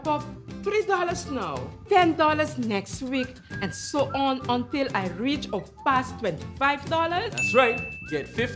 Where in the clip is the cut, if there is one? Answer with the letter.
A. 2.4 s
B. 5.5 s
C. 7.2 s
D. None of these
D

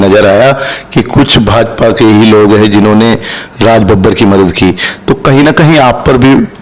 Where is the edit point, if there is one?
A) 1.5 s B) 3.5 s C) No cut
C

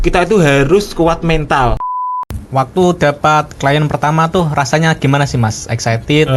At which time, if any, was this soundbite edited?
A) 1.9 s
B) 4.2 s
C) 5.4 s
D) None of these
A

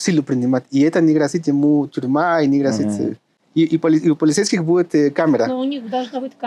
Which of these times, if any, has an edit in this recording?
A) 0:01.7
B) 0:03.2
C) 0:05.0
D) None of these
D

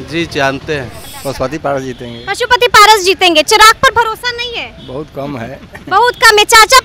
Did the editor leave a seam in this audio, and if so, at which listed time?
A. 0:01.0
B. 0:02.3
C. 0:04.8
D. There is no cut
A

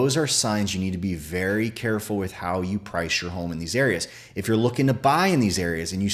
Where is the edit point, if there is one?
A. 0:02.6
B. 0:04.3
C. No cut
C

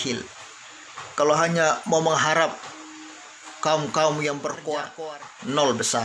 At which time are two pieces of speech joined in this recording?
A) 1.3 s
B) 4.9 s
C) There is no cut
B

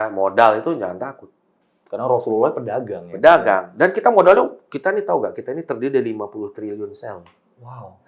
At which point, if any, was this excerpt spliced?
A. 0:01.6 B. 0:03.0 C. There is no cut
C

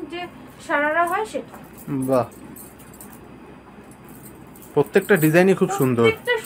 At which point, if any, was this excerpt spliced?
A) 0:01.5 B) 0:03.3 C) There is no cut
C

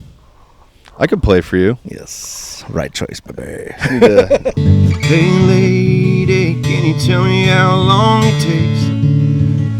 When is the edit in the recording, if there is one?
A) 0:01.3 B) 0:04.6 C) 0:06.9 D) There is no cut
B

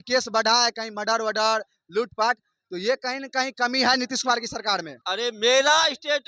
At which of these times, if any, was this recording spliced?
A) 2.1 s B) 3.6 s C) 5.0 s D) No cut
C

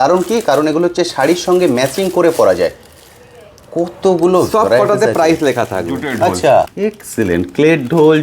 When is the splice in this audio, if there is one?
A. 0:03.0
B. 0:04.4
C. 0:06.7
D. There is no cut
C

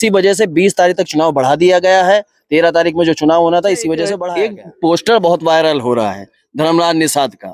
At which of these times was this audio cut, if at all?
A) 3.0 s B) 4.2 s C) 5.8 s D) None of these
B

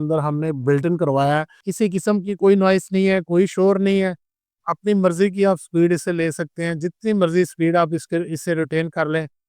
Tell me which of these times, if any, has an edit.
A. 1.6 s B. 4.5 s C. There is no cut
A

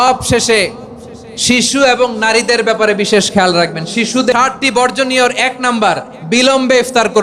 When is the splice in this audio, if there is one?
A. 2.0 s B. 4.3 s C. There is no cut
B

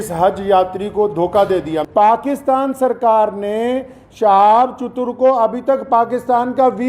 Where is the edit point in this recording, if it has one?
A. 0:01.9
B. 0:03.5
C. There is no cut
A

